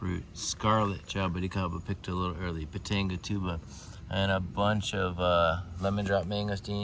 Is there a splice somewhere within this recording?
no; 0 cuts

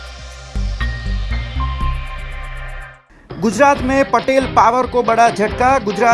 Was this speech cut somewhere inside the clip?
yes; 1 cut; at 2.9 s

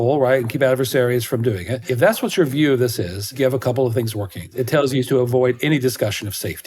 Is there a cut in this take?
yes; 3 cuts; at 1.9 s, 3.3 s, 4.5 s

